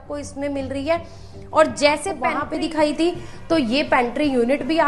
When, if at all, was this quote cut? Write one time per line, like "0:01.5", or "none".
0:02.4